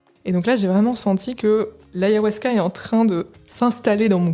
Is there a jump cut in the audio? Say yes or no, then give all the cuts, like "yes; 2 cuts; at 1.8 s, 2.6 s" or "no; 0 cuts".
yes; 2 cuts; at 1.8 s, 3.4 s